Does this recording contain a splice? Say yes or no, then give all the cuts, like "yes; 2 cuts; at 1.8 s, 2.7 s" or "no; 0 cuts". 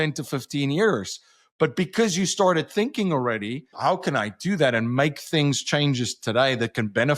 yes; 1 cut; at 3.7 s